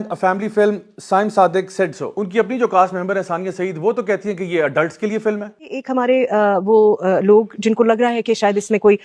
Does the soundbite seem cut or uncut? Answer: cut